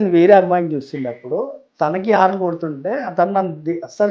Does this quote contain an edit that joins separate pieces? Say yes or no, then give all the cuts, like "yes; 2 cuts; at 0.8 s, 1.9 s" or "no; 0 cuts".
no; 0 cuts